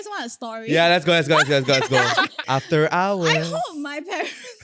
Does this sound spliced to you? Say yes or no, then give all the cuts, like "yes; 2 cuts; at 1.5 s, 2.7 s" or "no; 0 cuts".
yes; 1 cut; at 2.4 s